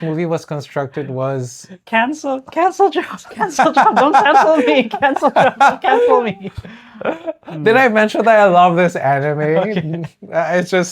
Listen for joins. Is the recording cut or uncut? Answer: cut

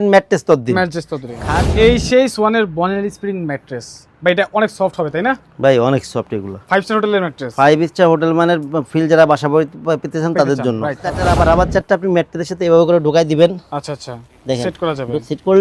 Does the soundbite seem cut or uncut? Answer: cut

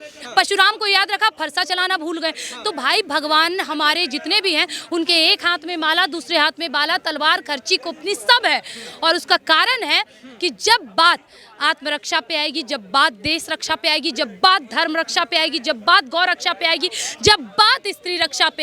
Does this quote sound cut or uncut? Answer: uncut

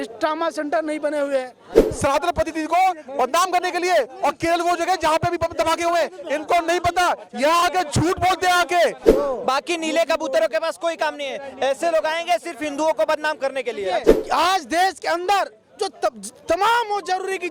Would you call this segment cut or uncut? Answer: cut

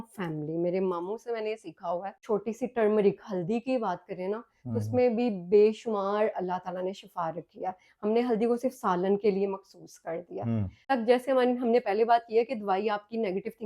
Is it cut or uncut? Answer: cut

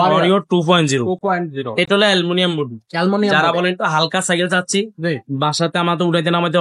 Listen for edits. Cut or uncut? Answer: uncut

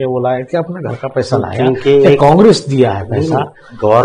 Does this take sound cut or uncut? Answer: uncut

